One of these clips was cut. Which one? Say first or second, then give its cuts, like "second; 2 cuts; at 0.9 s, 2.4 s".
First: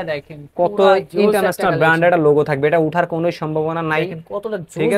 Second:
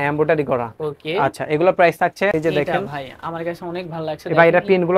second; 1 cut; at 2.3 s